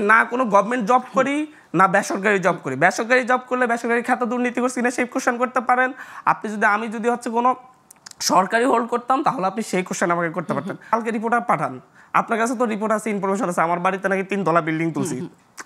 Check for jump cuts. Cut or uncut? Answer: cut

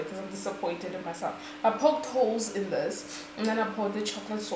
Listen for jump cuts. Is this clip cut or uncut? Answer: uncut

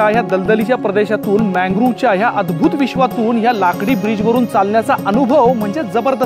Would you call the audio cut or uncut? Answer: uncut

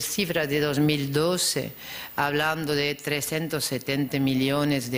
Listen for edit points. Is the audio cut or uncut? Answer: uncut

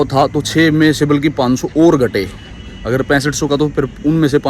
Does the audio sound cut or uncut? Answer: uncut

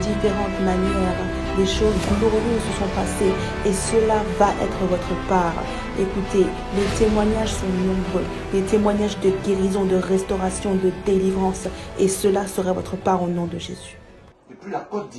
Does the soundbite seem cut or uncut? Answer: uncut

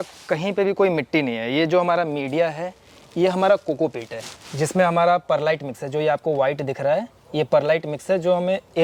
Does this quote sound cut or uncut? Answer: uncut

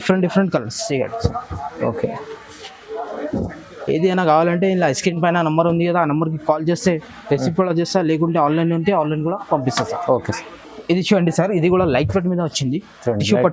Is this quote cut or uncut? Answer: uncut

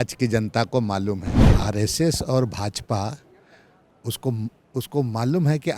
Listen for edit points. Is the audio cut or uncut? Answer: cut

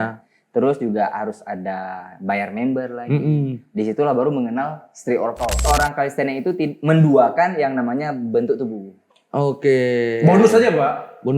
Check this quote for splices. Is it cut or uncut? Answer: cut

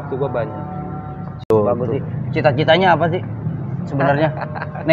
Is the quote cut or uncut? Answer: cut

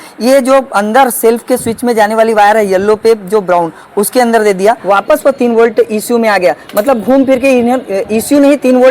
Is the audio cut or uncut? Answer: cut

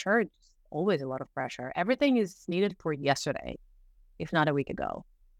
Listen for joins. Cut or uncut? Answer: uncut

